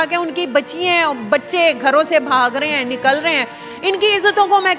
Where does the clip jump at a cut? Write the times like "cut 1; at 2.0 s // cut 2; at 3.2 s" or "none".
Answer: none